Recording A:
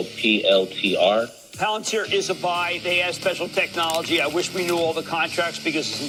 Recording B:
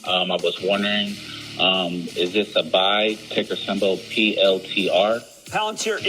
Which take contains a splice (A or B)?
B